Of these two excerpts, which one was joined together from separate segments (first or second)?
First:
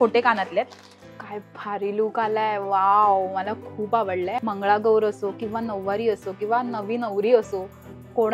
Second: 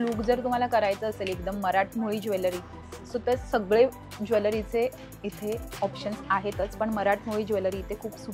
first